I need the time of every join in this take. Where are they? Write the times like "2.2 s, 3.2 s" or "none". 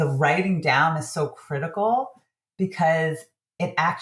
none